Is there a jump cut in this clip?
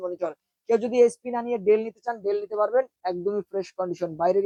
no; 0 cuts

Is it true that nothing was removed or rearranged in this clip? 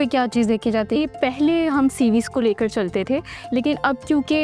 no; 1 cut; at 1.0 s

